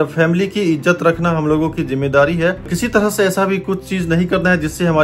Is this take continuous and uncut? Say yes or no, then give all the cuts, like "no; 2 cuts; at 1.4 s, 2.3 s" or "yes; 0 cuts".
no; 1 cut; at 2.7 s